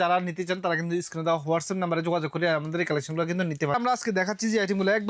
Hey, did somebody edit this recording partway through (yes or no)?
yes